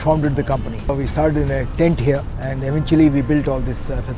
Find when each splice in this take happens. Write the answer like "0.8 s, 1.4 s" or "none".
0.9 s, 2.4 s